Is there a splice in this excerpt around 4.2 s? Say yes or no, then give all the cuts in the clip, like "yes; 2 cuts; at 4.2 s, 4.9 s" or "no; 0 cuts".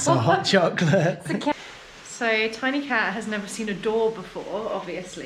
no; 1 cut; at 1.5 s